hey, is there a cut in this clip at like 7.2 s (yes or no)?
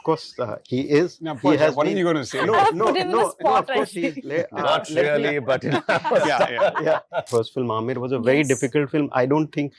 yes